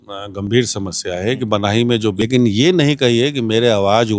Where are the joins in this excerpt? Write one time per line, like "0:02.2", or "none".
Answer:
0:02.2